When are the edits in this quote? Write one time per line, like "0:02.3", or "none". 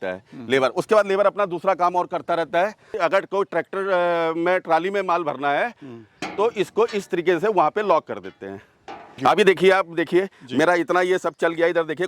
0:03.0
0:09.2